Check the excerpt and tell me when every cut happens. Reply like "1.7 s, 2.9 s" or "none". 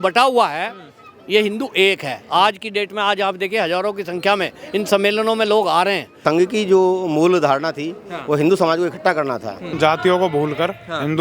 6.2 s, 9.7 s

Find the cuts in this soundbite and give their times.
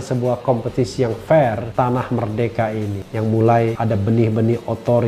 3.0 s, 3.8 s

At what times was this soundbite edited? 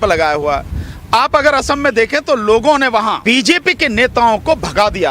3.2 s

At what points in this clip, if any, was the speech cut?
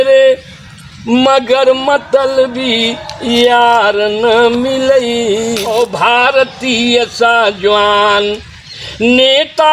5.6 s

